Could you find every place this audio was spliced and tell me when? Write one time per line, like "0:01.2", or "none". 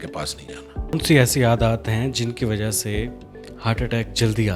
0:00.9